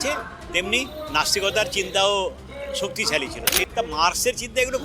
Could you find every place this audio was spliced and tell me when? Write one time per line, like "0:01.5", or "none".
0:03.7